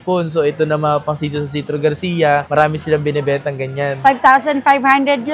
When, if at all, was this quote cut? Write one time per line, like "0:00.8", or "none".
none